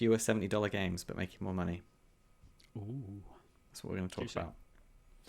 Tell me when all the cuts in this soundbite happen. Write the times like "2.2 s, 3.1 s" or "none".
none